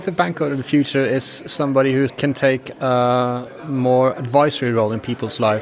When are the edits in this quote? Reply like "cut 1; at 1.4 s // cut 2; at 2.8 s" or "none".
cut 1; at 2.1 s

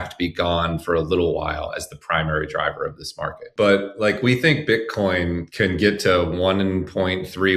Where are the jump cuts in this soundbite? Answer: cut 1; at 3.4 s // cut 2; at 5.5 s

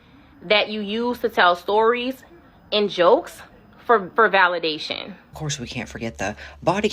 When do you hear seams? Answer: cut 1; at 5.3 s

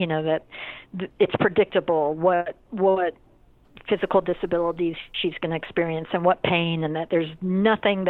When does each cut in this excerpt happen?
none

